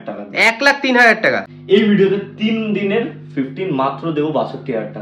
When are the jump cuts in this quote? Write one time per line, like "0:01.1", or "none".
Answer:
0:01.5